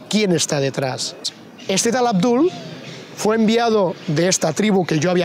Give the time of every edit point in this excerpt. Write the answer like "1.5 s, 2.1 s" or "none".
1.3 s